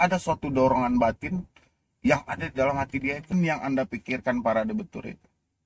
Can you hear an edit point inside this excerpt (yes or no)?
yes